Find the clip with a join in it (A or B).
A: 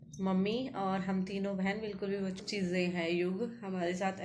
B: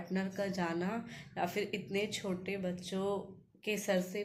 A